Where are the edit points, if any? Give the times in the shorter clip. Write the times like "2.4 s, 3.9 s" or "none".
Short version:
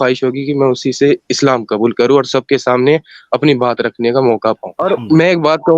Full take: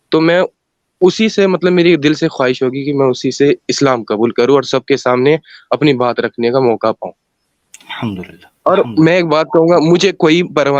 4.7 s